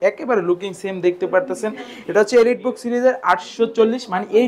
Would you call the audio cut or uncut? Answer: uncut